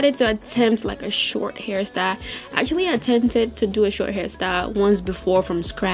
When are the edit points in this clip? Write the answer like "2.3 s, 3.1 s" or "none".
none